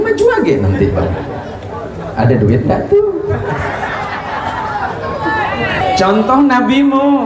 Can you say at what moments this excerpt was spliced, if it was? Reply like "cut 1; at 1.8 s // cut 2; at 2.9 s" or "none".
cut 1; at 5.8 s